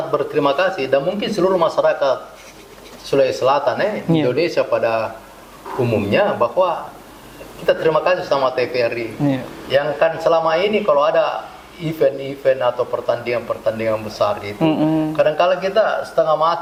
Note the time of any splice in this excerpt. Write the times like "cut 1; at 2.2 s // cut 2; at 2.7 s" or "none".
none